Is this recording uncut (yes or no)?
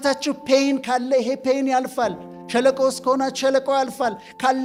yes